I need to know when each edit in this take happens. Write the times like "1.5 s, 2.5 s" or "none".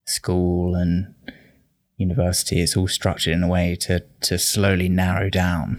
none